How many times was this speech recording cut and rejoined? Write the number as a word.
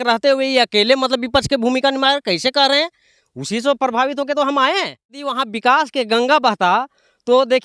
one